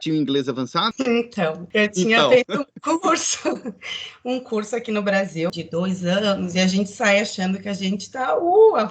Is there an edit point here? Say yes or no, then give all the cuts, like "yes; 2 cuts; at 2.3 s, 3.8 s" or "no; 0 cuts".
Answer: yes; 3 cuts; at 0.9 s, 1.6 s, 5.5 s